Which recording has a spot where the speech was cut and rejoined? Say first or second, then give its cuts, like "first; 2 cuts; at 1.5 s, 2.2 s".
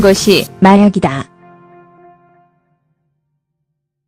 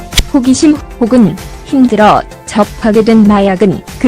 second; 1 cut; at 3.0 s